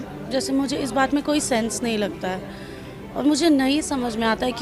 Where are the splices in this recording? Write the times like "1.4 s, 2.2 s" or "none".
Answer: none

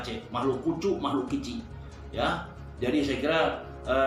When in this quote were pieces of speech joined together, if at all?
none

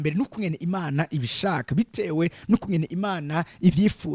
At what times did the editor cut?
none

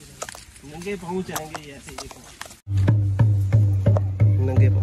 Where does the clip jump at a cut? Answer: 2.7 s

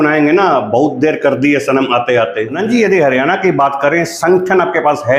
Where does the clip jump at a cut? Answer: 2.6 s

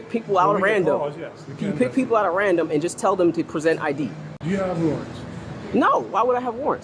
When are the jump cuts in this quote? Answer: 4.3 s

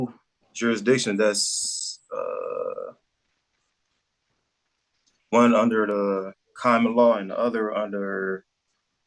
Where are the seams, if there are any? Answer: none

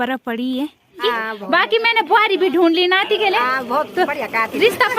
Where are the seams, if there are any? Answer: 1.0 s

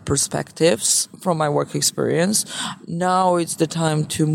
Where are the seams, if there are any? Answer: none

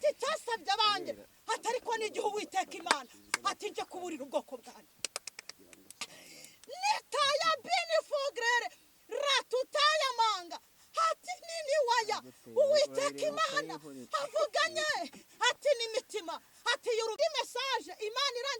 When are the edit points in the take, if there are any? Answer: 17.2 s

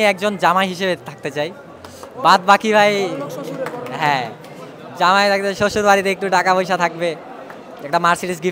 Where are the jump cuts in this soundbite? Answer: none

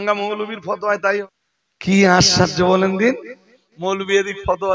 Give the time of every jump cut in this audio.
1.2 s

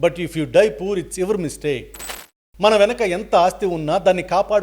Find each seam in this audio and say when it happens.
2.3 s

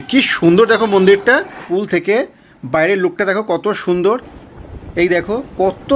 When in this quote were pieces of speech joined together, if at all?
1.6 s

